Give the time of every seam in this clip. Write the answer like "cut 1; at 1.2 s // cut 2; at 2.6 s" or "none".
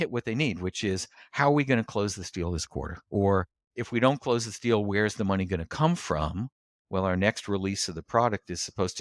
cut 1; at 3.0 s